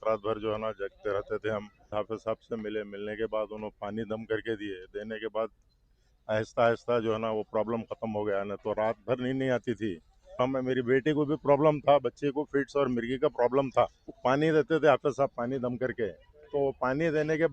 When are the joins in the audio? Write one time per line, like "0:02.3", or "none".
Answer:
0:01.9
0:10.4
0:14.0